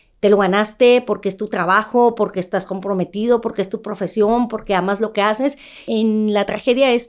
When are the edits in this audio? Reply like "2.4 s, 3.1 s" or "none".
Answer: 5.8 s